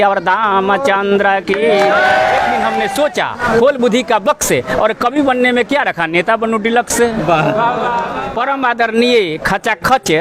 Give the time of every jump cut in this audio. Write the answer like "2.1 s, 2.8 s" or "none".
2.7 s, 8.1 s